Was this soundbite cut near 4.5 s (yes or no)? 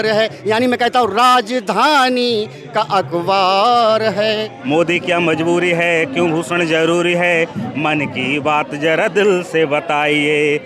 yes